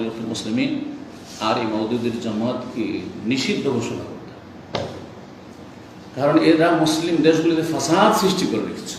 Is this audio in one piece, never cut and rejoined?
yes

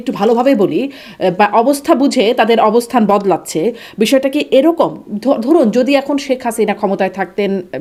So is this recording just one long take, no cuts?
yes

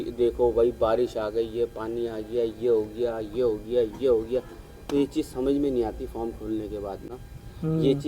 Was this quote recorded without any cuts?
yes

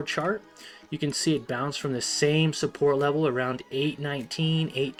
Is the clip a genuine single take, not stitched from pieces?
yes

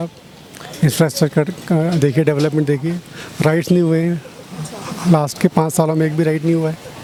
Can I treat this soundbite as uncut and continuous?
yes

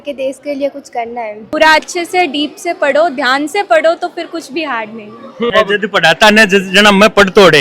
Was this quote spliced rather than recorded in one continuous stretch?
yes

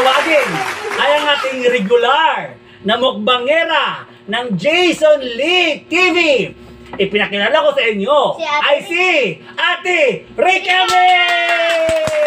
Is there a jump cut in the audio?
no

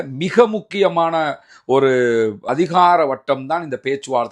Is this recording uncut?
no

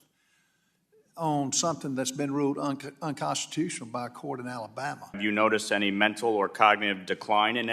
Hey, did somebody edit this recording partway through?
yes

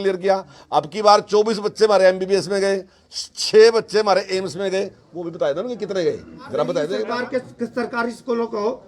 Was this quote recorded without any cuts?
no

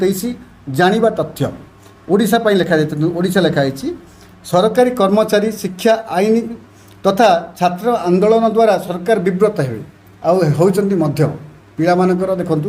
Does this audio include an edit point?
no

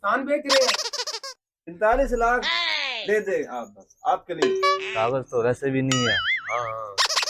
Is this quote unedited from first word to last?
yes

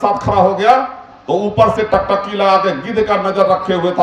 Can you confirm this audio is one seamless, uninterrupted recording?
yes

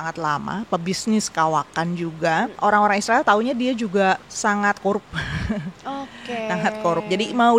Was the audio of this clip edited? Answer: yes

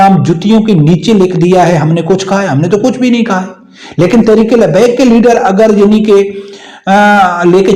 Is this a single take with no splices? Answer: yes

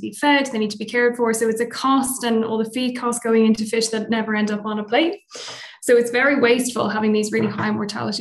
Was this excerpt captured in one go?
yes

